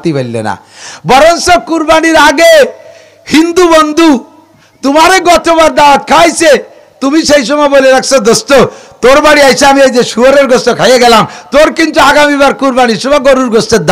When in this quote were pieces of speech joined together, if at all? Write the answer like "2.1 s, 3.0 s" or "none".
none